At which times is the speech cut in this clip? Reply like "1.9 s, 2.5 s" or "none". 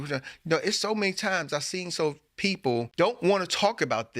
2.9 s